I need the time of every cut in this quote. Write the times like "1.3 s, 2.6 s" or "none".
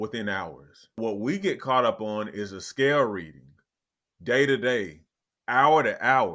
1.0 s

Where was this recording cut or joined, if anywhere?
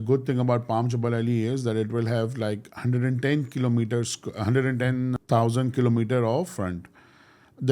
5.2 s, 6.6 s

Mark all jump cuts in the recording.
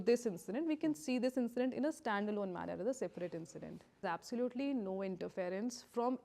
4.0 s

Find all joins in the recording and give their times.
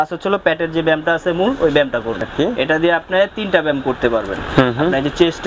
2.3 s

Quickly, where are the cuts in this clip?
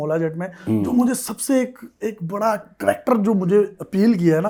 none

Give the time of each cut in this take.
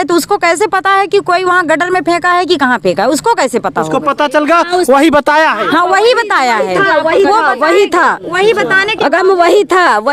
none

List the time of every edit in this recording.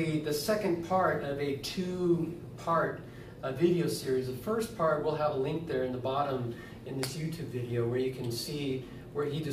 none

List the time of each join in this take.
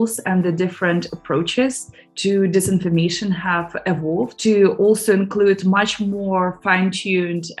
none

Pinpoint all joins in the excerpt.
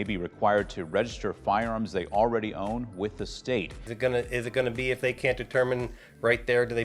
3.7 s

